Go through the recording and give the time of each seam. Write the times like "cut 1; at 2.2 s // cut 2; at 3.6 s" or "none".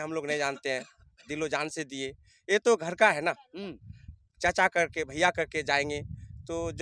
none